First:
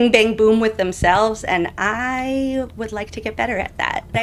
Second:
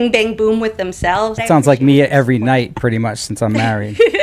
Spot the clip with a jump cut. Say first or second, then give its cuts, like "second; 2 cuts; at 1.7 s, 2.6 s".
second; 1 cut; at 1.4 s